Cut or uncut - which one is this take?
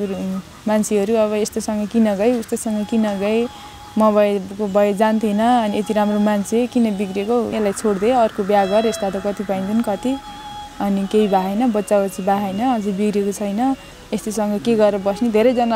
cut